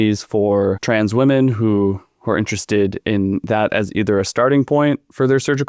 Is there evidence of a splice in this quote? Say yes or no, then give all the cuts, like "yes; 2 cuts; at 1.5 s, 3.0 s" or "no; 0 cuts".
no; 0 cuts